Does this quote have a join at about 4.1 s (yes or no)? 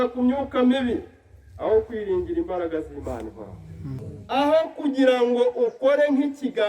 yes